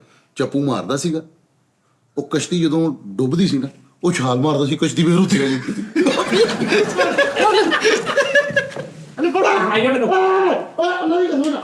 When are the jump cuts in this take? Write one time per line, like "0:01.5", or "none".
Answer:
none